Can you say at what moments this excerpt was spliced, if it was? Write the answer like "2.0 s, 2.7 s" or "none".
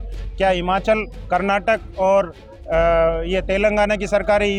none